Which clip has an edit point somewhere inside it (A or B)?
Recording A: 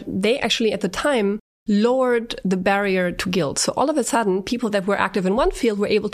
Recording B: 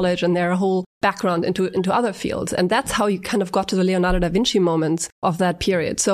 B